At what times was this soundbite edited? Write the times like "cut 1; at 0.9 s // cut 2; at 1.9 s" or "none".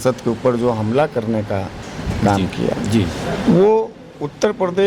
none